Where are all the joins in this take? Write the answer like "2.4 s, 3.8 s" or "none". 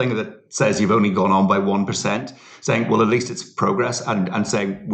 none